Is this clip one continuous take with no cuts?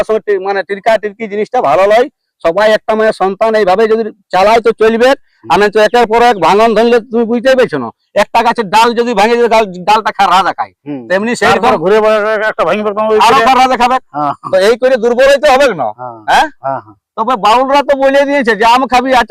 yes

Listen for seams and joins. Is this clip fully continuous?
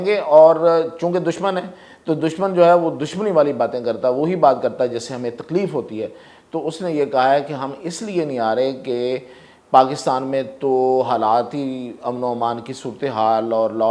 yes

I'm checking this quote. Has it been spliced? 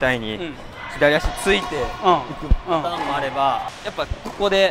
yes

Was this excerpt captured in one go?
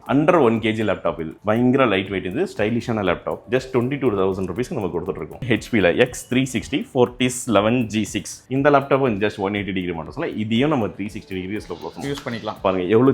no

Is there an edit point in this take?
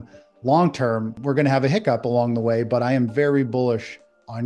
yes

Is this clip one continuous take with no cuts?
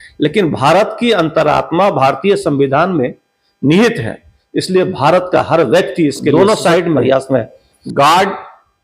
no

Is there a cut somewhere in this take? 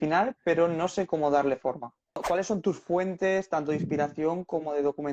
yes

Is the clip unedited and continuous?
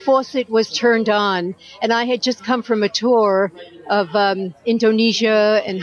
no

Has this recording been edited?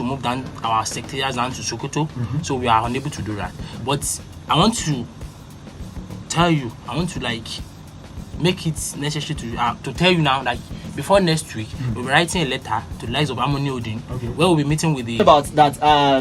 yes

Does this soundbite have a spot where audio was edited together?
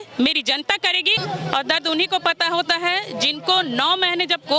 yes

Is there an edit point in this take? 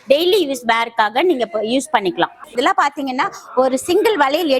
yes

